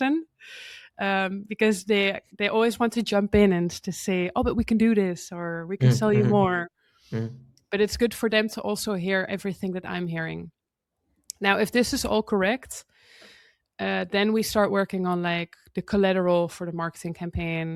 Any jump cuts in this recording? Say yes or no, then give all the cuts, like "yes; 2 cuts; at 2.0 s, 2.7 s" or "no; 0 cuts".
no; 0 cuts